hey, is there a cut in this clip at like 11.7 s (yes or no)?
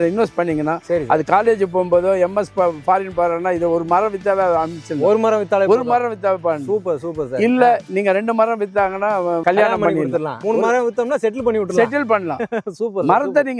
no